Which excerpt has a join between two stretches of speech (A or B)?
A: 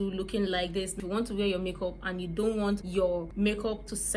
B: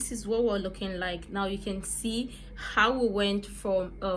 A